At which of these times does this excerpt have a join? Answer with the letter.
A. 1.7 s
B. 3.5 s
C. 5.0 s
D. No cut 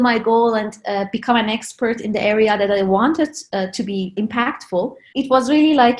C